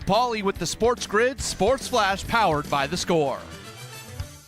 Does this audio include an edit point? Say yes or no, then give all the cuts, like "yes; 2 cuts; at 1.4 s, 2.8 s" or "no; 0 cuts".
yes; 1 cut; at 3.4 s